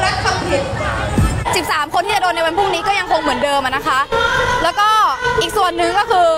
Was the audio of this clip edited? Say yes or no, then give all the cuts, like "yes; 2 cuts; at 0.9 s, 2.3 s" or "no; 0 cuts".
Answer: yes; 1 cut; at 1.4 s